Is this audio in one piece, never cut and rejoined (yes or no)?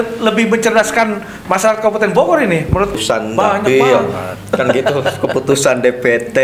no